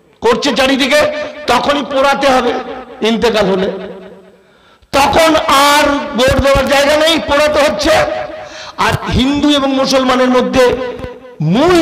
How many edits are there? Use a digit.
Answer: 0